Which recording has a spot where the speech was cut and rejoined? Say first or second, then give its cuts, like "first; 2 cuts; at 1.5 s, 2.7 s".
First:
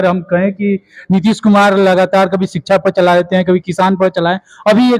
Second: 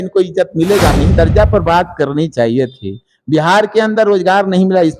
second; 1 cut; at 1.1 s